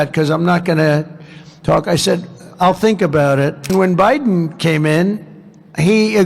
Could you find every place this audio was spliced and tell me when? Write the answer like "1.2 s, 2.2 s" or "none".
3.7 s